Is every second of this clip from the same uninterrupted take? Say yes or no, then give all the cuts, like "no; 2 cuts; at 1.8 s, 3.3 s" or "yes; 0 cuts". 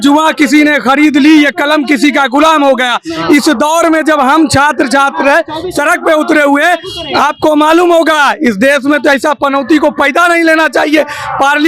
yes; 0 cuts